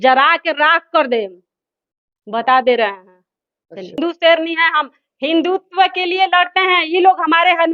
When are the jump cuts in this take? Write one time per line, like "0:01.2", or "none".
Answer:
0:04.0